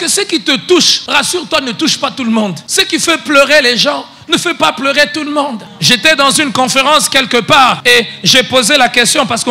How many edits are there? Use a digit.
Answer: 4